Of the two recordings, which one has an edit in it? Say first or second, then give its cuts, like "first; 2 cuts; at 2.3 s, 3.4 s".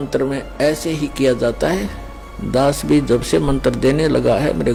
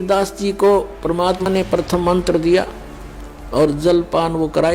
second; 1 cut; at 1.4 s